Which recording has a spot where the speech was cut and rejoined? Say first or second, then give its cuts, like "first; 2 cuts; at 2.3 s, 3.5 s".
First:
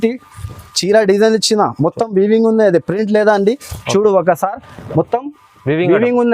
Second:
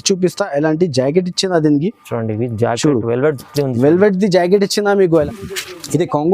second; 1 cut; at 5.2 s